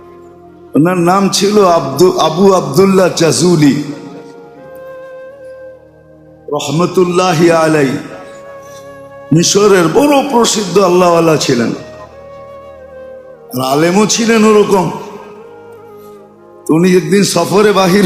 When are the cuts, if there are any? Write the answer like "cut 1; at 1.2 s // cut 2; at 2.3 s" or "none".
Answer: cut 1; at 4.2 s // cut 2; at 5.9 s // cut 3; at 11.8 s // cut 4; at 13.4 s